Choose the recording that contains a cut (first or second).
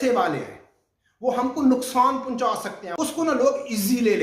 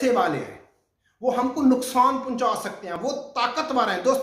first